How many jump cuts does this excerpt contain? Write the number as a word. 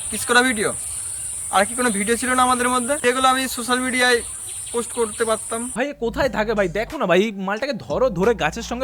one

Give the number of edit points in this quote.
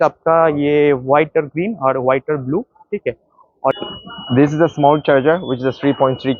one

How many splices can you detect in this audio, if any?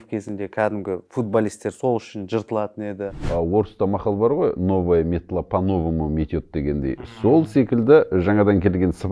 one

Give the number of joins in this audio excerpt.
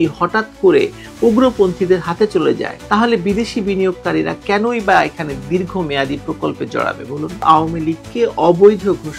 one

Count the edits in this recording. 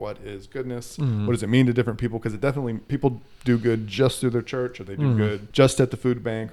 one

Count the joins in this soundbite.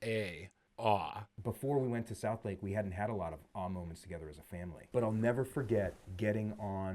three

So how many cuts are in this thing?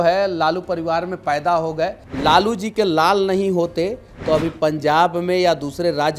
one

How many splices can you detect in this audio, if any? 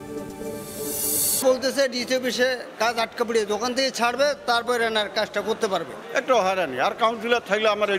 two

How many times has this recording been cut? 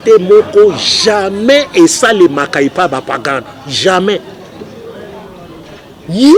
zero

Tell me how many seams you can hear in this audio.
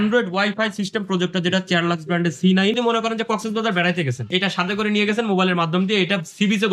two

